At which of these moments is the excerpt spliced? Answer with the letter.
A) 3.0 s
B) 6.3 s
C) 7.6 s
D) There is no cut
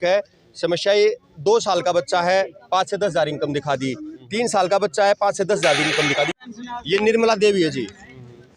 B